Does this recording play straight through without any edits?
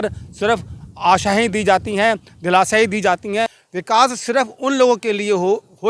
no; 1 cut; at 3.7 s

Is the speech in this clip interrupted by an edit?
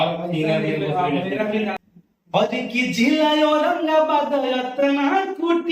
yes; 1 cut; at 1.8 s

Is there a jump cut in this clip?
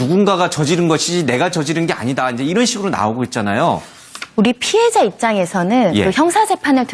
yes; 1 cut; at 3.4 s

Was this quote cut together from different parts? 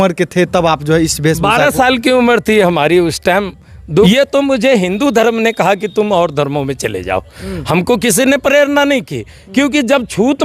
yes; 1 cut; at 4.1 s

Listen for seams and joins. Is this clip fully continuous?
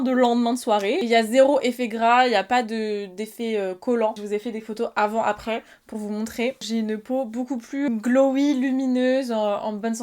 no; 4 cuts; at 1.0 s, 4.1 s, 6.6 s, 7.9 s

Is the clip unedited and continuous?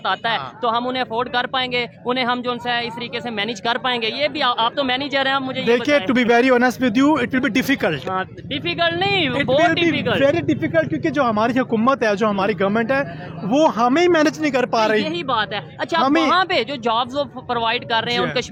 yes; 0 cuts

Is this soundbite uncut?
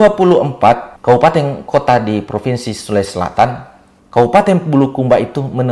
no; 2 cuts; at 0.9 s, 1.6 s

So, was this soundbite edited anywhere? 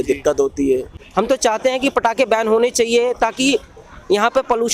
yes; 1 cut; at 1.0 s

